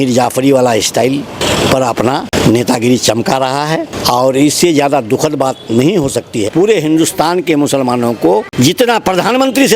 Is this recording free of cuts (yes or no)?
no